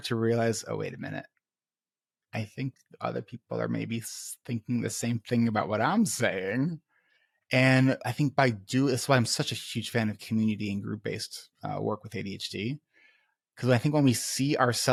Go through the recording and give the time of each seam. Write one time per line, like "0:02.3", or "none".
none